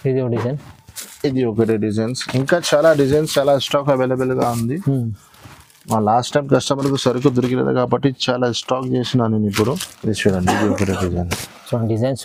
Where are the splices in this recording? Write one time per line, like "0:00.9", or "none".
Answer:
none